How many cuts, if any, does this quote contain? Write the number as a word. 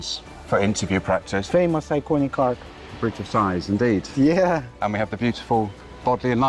one